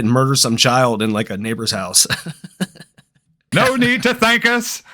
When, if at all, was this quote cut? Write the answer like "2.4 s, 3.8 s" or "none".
3.5 s

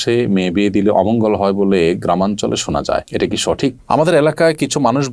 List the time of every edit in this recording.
3.8 s

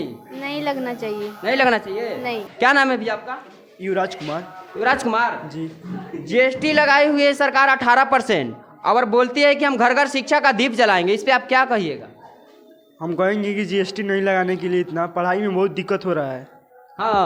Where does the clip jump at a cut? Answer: none

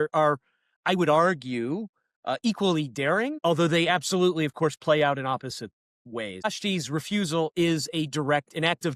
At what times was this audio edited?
3.3 s, 6.4 s

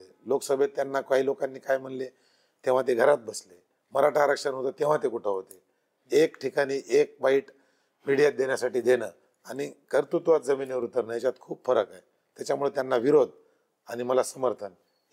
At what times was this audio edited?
none

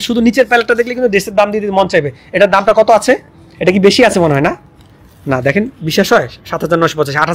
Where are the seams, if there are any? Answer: none

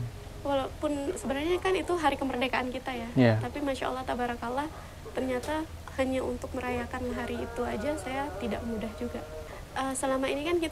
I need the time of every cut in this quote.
9.4 s

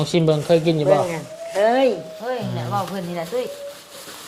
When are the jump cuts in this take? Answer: none

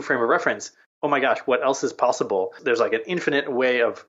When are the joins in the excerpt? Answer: 2.6 s

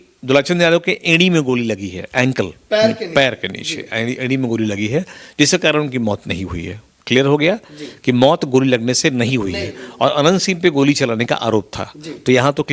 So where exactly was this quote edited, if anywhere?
none

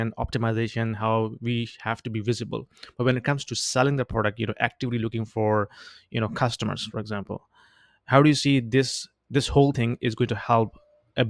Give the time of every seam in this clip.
none

